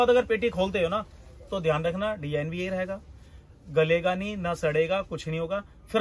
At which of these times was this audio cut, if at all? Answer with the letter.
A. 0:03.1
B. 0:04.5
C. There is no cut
C